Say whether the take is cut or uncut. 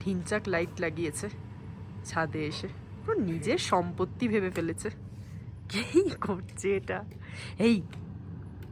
uncut